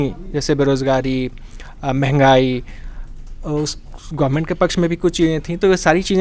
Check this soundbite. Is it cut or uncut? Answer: uncut